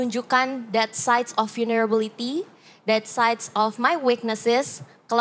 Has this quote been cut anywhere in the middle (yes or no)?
no